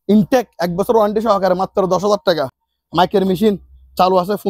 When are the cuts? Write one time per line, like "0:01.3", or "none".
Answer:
none